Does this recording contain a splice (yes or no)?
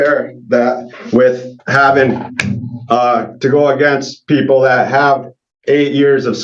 no